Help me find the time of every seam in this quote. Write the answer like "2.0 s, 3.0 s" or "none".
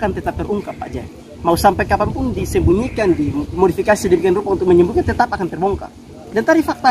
3.5 s

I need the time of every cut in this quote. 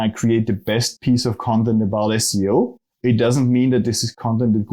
2.8 s

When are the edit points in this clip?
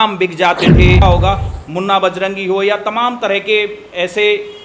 1.0 s

